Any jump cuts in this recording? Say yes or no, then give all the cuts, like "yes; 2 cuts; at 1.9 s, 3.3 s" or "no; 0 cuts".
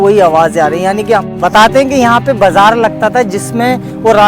yes; 1 cut; at 1.3 s